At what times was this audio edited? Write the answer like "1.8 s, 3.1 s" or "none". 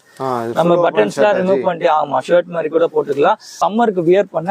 3.6 s